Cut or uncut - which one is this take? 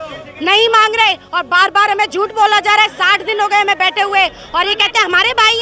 uncut